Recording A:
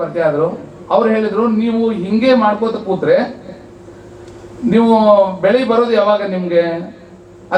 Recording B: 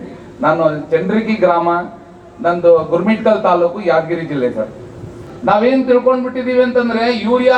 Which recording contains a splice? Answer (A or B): B